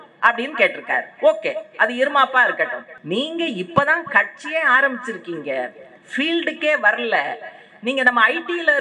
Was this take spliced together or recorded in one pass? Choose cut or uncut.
cut